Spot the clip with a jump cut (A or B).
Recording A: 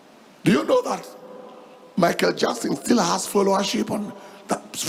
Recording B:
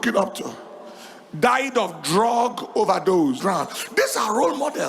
B